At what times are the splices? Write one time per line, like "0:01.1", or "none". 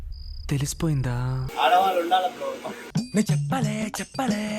0:01.4